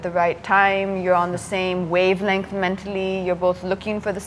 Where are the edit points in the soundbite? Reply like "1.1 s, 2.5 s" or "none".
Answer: none